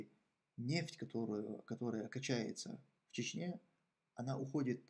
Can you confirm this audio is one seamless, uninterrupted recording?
yes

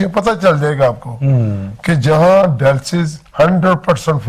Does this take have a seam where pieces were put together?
no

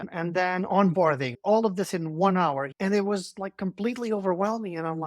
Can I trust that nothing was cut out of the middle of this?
no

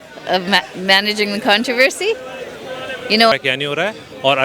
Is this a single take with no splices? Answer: no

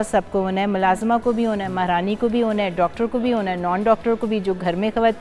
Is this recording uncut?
yes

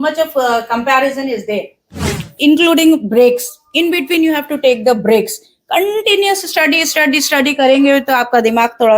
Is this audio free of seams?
no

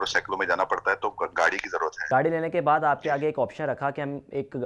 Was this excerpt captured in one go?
no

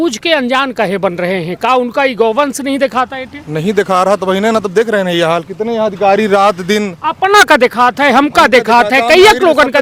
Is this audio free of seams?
yes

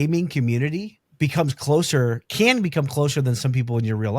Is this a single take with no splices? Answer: no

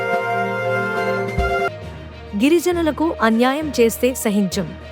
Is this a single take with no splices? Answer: no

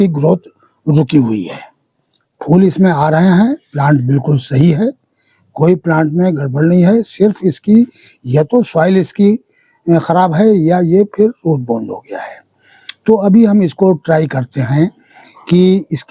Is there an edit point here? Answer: no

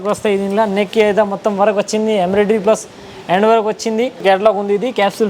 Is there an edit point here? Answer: yes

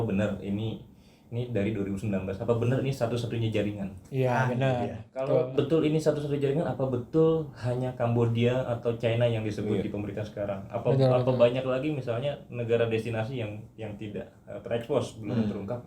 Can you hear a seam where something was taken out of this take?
no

